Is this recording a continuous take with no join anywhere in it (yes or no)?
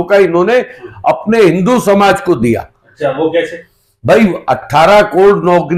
yes